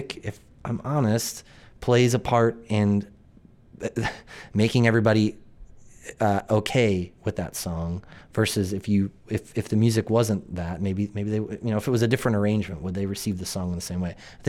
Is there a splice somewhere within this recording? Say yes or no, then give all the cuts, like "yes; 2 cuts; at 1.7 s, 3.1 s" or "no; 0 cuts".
no; 0 cuts